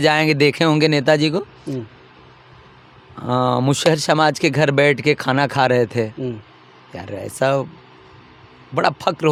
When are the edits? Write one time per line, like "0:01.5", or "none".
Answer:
none